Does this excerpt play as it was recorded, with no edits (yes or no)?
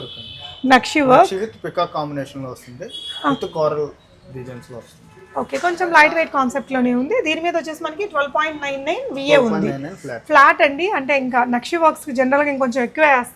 yes